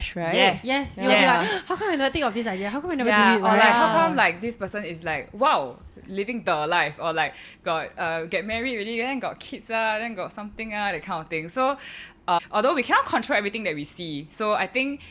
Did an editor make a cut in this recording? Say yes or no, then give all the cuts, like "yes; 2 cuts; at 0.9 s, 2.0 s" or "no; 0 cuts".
yes; 1 cut; at 12.4 s